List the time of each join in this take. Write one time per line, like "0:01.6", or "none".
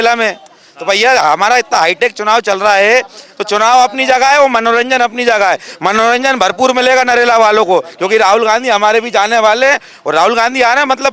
none